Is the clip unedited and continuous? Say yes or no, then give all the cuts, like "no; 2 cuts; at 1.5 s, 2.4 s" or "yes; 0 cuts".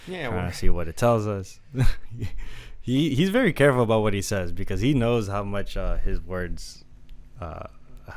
yes; 0 cuts